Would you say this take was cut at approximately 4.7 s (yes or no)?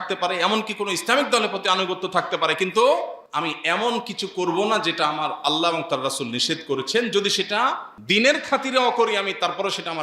no